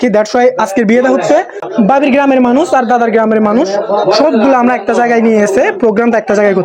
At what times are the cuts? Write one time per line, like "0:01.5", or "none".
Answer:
0:01.6